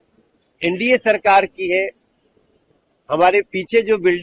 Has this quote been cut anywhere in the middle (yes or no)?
no